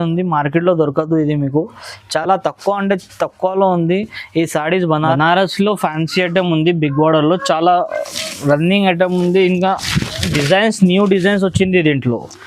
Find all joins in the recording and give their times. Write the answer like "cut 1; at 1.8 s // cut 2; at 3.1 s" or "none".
cut 1; at 5.1 s